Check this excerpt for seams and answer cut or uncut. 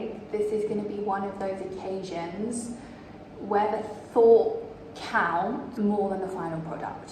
uncut